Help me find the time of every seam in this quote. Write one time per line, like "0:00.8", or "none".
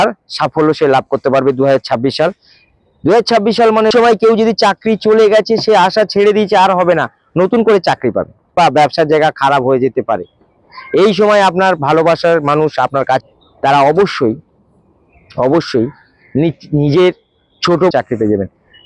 0:03.9
0:08.5
0:13.2
0:17.9